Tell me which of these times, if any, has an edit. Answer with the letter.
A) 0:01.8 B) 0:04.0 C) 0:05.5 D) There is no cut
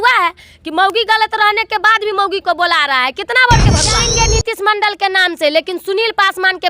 B